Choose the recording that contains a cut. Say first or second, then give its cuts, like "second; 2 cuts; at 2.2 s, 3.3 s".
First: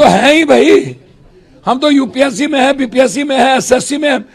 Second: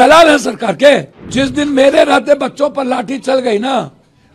second; 1 cut; at 1.2 s